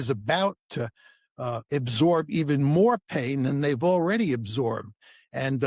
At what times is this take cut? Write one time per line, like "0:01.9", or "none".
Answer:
none